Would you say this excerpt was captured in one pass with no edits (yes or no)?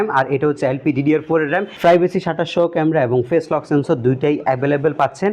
no